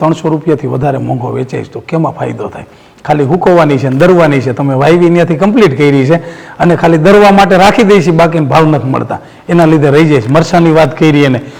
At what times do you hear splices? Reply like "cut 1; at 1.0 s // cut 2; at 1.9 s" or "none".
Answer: none